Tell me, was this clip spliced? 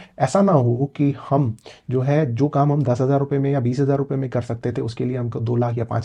no; 0 cuts

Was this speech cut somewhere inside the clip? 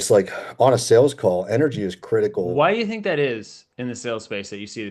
yes; 1 cut; at 2.5 s

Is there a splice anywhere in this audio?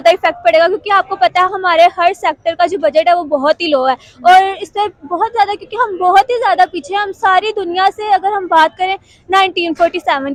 no; 0 cuts

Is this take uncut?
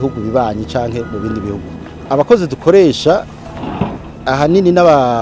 yes; 0 cuts

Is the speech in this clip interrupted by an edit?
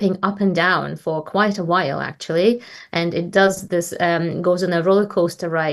no; 0 cuts

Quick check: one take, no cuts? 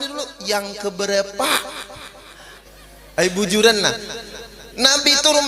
no; 1 cut; at 2.6 s

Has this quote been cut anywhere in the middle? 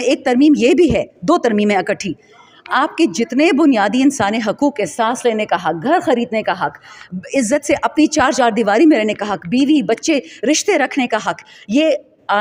no; 0 cuts

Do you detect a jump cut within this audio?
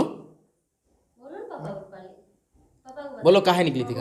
no; 0 cuts

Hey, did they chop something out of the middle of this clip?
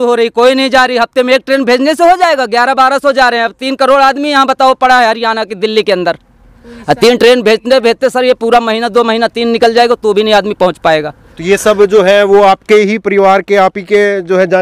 no; 0 cuts

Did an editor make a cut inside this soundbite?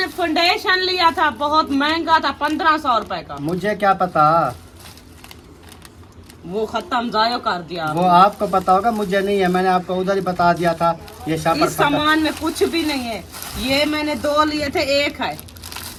no; 0 cuts

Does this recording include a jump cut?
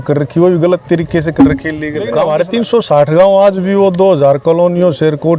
yes; 1 cut; at 2.2 s

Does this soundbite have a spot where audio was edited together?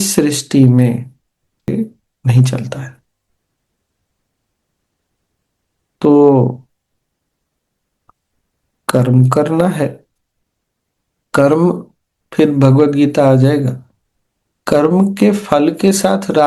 yes; 1 cut; at 1.6 s

